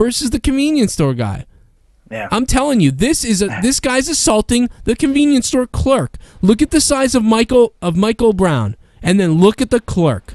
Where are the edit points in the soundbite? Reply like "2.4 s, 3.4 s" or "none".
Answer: 7.3 s